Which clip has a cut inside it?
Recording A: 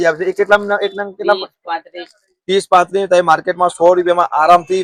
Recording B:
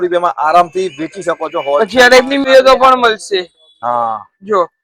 B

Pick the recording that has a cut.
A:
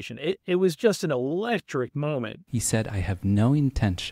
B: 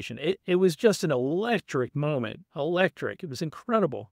A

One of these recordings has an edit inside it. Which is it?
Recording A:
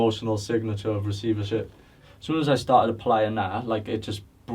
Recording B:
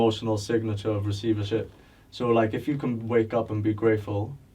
A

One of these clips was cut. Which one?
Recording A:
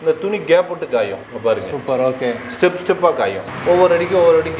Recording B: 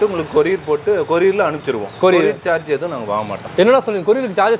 A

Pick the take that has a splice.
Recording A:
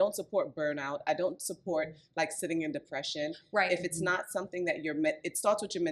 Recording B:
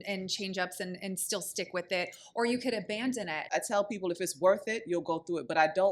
B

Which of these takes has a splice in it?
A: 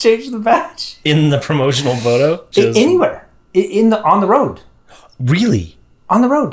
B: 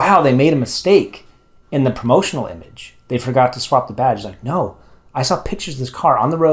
A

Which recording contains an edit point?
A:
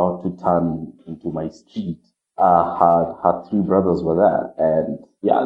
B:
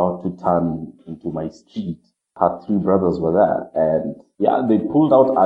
B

